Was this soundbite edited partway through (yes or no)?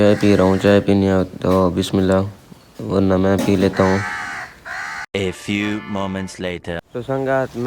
no